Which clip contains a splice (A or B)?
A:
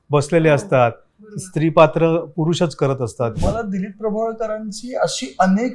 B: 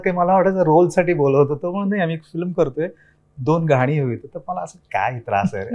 A